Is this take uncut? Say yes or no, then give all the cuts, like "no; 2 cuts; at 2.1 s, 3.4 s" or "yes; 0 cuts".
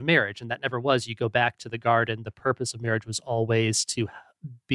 yes; 0 cuts